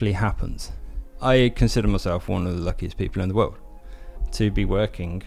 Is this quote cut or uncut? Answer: cut